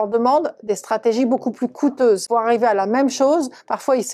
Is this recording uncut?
no; 1 cut; at 2.2 s

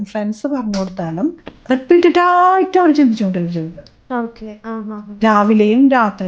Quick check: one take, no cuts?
no; 1 cut; at 1.5 s

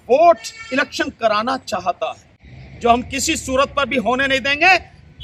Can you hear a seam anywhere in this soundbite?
no; 0 cuts

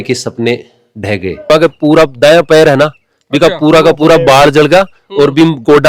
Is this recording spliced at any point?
yes; 1 cut; at 1.4 s

